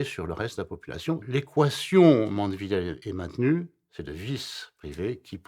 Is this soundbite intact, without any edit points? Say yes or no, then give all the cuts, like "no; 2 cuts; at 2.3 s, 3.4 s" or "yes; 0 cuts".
no; 2 cuts; at 1.2 s, 3.0 s